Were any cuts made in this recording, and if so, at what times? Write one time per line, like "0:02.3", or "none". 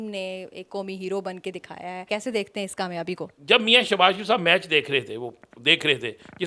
0:02.1
0:03.3